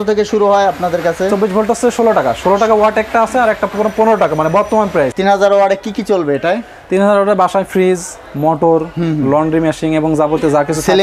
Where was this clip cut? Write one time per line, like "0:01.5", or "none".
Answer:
0:05.1

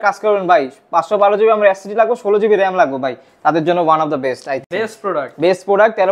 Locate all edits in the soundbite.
none

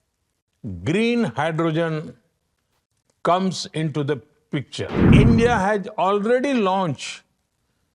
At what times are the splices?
0:05.0

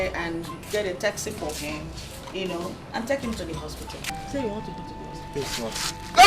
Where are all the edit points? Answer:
0:04.0

